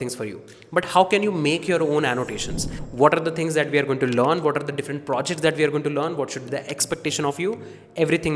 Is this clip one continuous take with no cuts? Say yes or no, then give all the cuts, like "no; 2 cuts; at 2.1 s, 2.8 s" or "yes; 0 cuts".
no; 1 cut; at 2.8 s